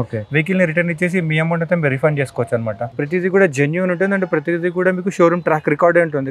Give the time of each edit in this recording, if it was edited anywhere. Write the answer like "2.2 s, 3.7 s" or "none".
3.0 s